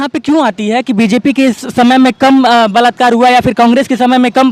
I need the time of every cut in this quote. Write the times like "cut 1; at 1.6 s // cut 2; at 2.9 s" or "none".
none